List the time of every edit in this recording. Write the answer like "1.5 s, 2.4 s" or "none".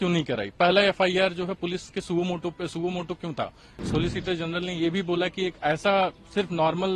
3.8 s